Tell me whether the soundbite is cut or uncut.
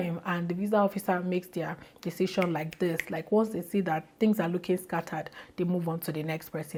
uncut